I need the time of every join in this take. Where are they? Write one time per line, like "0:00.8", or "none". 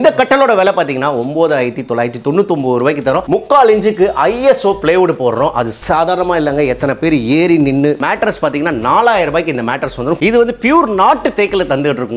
0:03.2
0:08.0
0:10.2